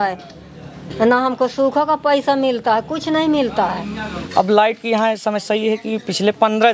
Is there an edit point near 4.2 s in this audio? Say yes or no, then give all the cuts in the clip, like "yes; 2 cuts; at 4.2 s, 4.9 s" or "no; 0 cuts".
yes; 1 cut; at 4.2 s